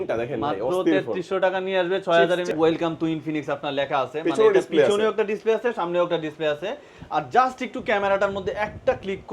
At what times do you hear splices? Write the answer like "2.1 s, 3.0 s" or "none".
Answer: 2.5 s